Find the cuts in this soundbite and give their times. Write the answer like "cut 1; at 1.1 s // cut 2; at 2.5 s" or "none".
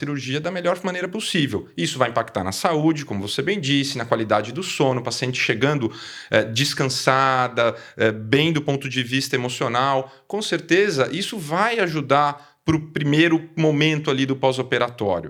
none